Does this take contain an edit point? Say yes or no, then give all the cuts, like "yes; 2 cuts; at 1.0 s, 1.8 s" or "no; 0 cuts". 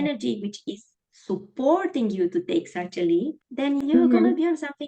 yes; 1 cut; at 3.9 s